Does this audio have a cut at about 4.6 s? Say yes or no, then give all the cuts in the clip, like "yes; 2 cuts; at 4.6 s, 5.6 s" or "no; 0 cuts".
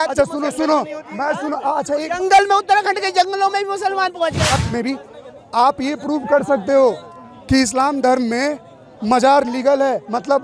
yes; 1 cut; at 4.6 s